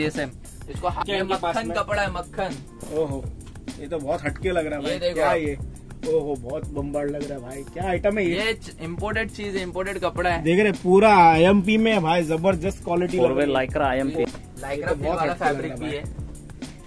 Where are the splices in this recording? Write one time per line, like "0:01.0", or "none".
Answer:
0:01.0
0:14.2

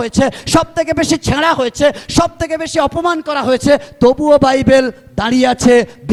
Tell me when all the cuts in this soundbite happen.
none

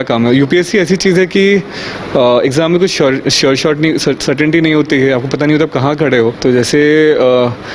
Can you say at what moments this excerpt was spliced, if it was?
0:06.4

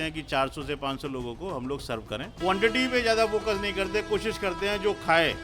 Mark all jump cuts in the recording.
0:02.3

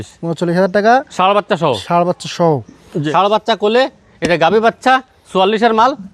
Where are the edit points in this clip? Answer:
0:02.9

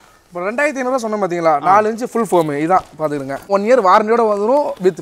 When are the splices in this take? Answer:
0:03.5

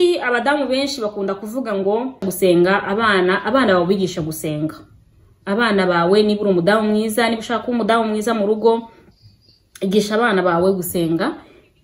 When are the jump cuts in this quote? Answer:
0:02.3

